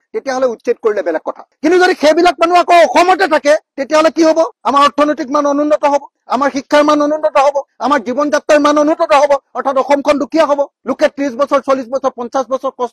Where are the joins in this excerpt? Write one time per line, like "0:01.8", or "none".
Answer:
none